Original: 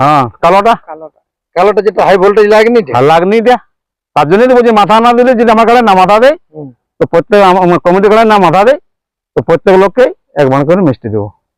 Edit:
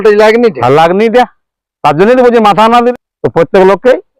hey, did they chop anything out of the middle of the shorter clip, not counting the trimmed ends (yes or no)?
yes